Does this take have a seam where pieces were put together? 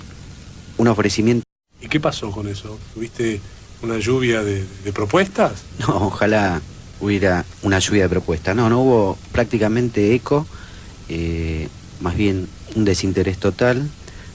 no; 0 cuts

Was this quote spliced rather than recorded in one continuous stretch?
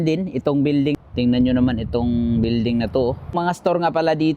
yes; 2 cuts; at 1.0 s, 3.3 s

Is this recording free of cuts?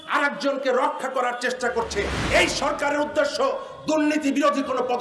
no; 1 cut; at 2.2 s

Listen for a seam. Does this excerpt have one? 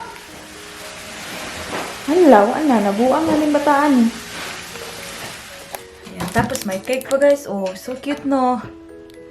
yes; 1 cut; at 5.9 s

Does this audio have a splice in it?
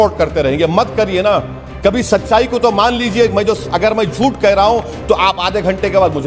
no; 0 cuts

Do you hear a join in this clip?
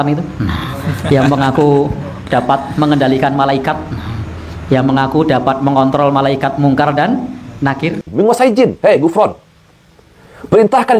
yes; 1 cut; at 8.0 s

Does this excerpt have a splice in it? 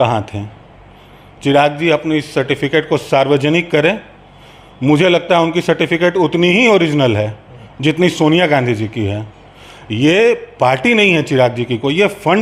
no; 0 cuts

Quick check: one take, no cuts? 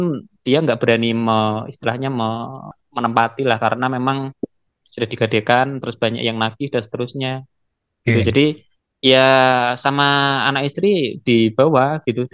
yes; 0 cuts

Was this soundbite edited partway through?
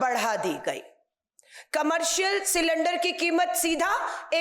no; 0 cuts

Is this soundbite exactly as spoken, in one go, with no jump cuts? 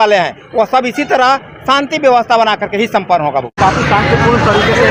yes; 0 cuts

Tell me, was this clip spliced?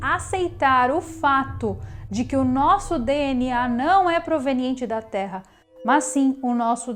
no; 0 cuts

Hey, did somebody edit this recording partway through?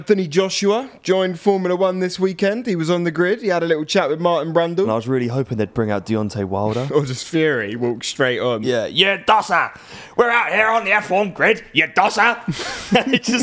yes; 3 cuts; at 4.9 s, 6.9 s, 8.6 s

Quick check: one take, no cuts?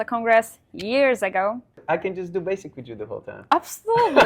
no; 1 cut; at 1.8 s

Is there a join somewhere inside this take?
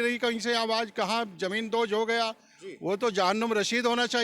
no; 0 cuts

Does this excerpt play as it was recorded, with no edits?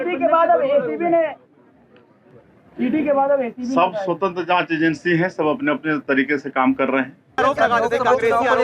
no; 1 cut; at 7.3 s

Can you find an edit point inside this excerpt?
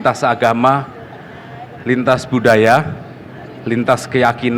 no; 0 cuts

